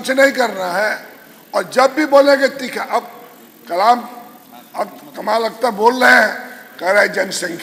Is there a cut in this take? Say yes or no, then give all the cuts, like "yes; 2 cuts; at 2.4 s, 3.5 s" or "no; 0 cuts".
no; 0 cuts